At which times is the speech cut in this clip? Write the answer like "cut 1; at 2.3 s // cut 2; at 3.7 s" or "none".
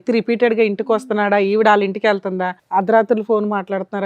cut 1; at 2.5 s